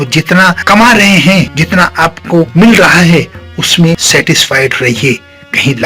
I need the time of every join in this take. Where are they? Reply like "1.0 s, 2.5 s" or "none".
1.6 s, 4.0 s